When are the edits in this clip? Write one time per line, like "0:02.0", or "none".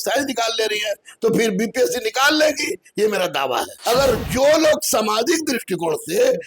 0:03.7